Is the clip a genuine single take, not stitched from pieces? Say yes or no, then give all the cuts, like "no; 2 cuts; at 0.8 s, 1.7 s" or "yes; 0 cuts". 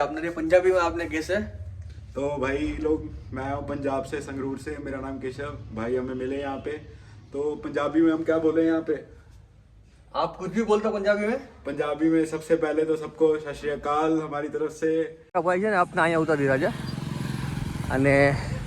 no; 1 cut; at 15.2 s